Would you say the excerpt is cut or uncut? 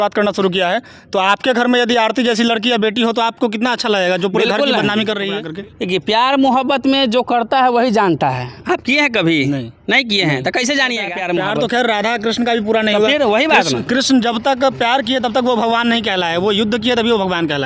cut